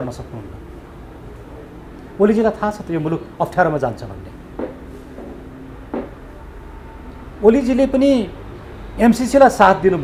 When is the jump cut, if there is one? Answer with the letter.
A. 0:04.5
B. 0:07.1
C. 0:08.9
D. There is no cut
D